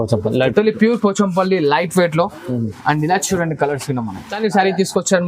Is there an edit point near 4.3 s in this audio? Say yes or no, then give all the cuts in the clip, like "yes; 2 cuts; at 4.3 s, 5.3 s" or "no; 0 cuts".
yes; 1 cut; at 4.3 s